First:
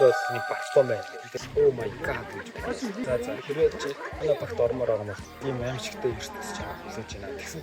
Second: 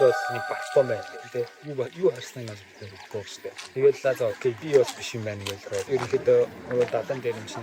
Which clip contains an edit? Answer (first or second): first